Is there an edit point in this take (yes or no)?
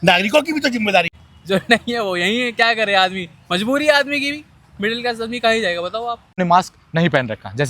yes